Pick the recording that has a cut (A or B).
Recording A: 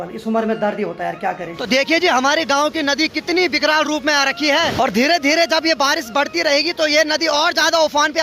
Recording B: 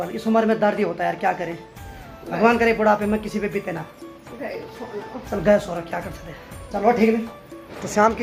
A